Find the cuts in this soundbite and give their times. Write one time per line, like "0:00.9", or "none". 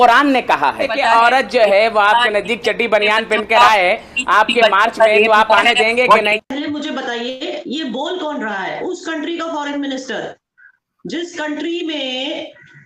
0:01.0
0:06.4